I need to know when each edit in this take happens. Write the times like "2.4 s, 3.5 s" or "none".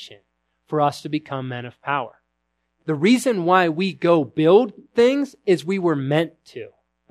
2.7 s